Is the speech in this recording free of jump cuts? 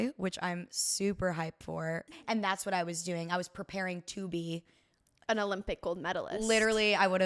no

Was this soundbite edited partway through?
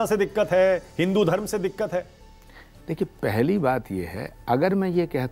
no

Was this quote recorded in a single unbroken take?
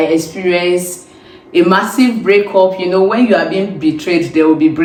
yes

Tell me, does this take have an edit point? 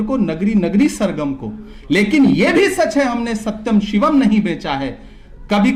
no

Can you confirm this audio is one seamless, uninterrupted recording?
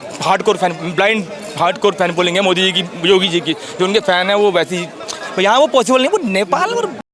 yes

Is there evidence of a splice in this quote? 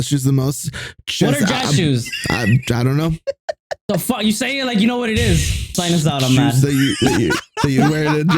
yes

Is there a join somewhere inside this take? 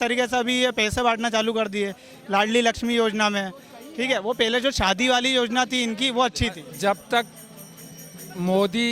yes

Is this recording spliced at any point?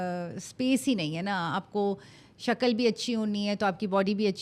no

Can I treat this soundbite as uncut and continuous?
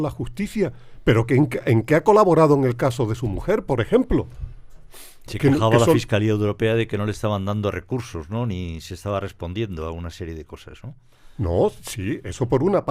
yes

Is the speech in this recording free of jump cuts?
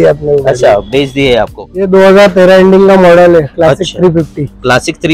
no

